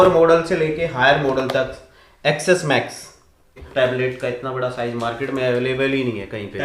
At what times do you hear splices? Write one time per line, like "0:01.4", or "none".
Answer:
0:03.6